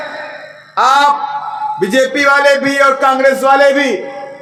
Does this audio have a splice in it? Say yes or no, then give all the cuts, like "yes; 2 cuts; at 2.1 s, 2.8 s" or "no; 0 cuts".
no; 0 cuts